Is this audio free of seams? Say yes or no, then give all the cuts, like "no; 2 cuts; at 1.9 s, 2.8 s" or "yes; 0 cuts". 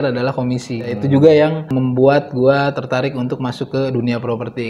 no; 2 cuts; at 1.0 s, 1.7 s